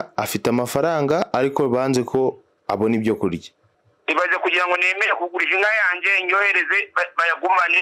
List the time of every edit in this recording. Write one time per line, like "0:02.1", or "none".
0:02.5